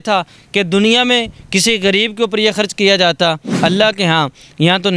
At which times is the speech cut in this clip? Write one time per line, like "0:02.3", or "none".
0:03.5